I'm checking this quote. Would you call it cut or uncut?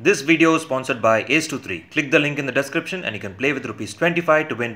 uncut